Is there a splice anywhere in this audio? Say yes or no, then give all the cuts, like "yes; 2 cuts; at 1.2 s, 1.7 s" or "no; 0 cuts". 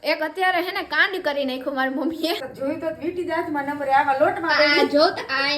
yes; 1 cut; at 2.5 s